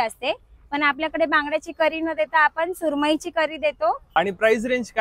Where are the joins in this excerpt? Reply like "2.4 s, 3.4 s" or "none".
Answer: 4.0 s